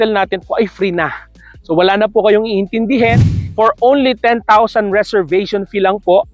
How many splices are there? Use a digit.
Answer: 1